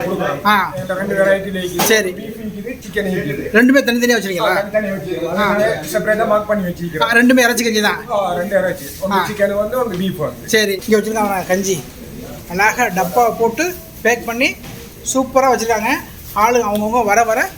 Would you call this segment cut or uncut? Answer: cut